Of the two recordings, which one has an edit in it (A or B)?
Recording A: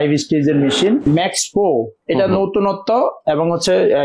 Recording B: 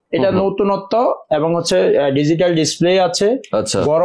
A